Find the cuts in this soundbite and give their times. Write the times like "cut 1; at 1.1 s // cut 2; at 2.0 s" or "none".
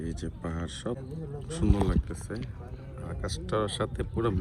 cut 1; at 1.0 s